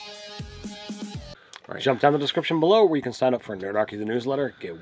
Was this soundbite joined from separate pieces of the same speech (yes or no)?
yes